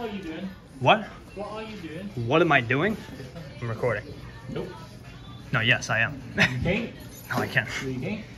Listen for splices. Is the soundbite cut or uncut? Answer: uncut